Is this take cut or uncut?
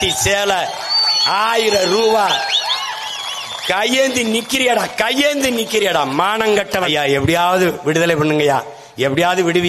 cut